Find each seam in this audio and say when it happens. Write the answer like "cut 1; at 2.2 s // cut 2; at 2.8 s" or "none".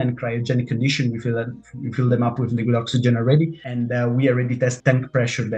cut 1; at 3.6 s // cut 2; at 4.8 s